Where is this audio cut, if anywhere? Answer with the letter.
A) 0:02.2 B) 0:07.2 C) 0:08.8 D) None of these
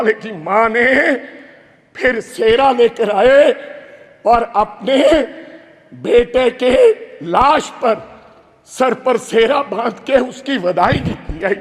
D